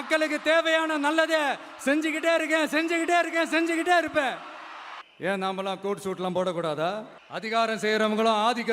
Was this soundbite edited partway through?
yes; 1 cut; at 5.0 s

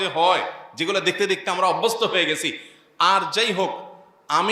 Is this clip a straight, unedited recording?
yes; 0 cuts

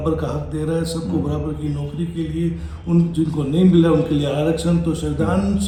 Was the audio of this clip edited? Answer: no; 0 cuts

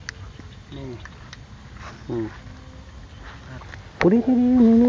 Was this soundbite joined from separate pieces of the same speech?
yes; 1 cut; at 3.6 s

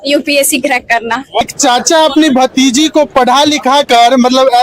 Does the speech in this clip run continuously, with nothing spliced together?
no; 1 cut; at 1.4 s

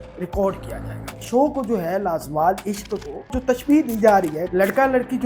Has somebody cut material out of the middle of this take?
yes; 3 cuts; at 1.2 s, 3.4 s, 4.4 s

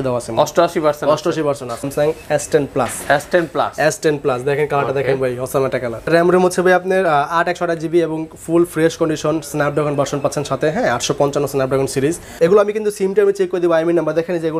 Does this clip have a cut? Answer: yes; 3 cuts; at 1.9 s, 6.1 s, 12.2 s

